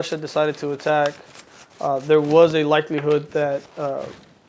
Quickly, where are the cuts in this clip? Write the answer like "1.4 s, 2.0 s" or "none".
none